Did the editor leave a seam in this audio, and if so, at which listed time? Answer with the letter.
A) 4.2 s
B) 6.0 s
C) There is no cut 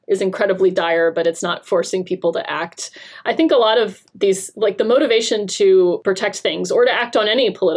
B